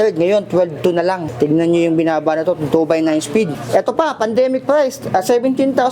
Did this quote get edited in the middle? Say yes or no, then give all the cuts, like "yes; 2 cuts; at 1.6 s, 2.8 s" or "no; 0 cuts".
yes; 2 cuts; at 1.3 s, 3.6 s